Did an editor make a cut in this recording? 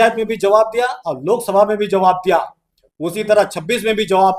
no; 0 cuts

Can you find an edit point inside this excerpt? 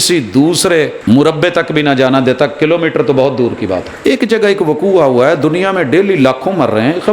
yes; 2 cuts; at 1.0 s, 4.0 s

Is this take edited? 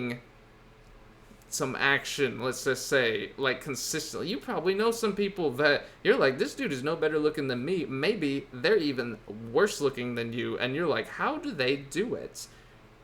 no; 0 cuts

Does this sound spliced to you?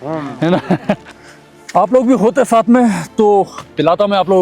yes; 1 cut; at 1.1 s

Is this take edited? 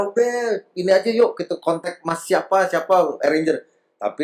no; 0 cuts

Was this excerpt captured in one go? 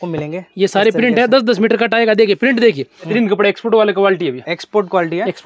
no; 1 cut; at 3.1 s

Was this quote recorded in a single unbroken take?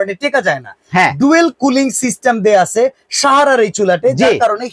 yes; 0 cuts

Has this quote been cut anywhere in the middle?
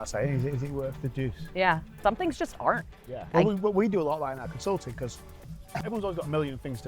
yes; 3 cuts; at 2.0 s, 3.3 s, 5.8 s

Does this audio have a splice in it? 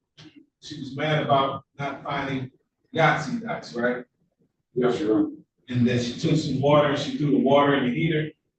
no; 0 cuts

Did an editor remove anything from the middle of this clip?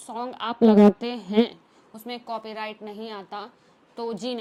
no; 0 cuts

